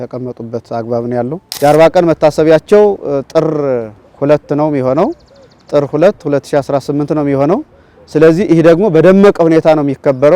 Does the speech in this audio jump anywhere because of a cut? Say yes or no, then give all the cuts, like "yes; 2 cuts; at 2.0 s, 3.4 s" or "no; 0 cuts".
yes; 1 cut; at 1.4 s